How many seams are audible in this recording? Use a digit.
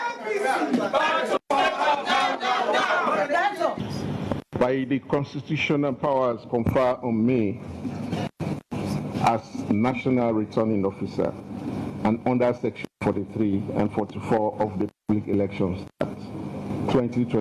1